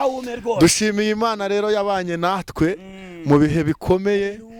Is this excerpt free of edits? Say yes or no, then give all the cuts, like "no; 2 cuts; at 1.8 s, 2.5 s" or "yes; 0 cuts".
yes; 0 cuts